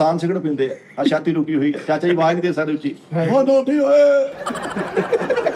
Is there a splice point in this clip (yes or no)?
no